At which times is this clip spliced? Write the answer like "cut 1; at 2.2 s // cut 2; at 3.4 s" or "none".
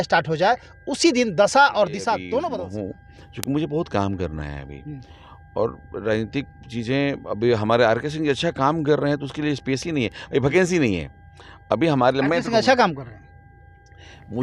cut 1; at 2.5 s